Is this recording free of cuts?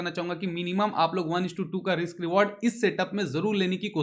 yes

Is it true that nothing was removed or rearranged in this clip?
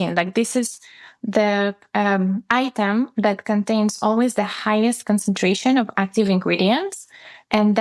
yes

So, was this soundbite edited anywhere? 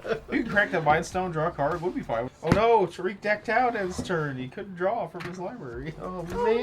yes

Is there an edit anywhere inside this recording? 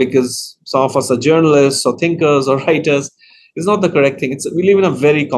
no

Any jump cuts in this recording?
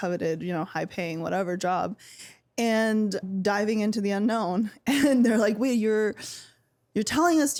no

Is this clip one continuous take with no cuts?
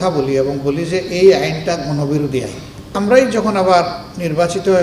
no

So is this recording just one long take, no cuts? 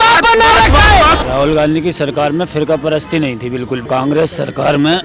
no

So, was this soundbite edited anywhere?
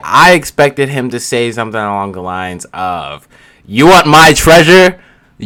no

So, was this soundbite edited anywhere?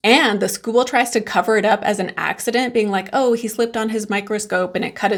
no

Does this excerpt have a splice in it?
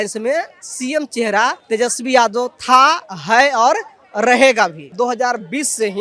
yes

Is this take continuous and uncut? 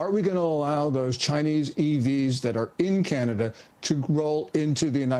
yes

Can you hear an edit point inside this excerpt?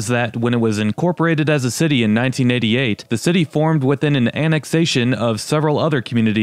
no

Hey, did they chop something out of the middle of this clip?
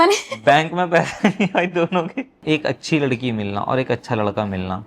yes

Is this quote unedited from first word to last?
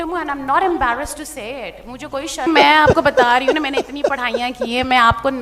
no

